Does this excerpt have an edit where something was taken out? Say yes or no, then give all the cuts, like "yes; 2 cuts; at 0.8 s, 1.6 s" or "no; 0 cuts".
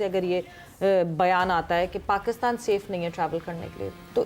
no; 0 cuts